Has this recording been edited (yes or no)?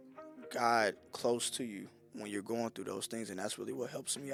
no